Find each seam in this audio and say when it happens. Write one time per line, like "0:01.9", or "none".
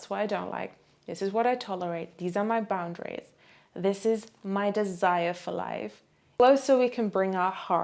0:06.4

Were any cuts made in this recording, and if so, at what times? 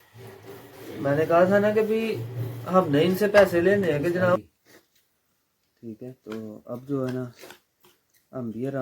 0:04.4

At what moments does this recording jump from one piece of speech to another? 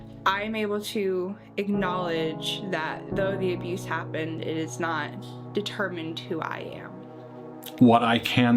0:07.4

